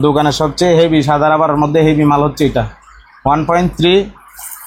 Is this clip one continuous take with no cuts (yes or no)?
yes